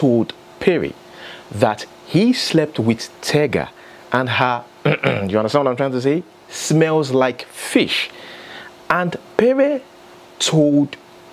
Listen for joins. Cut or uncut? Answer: uncut